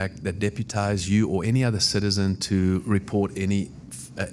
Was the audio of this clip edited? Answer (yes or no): no